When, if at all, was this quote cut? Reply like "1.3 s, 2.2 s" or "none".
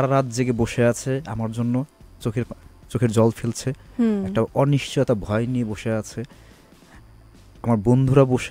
none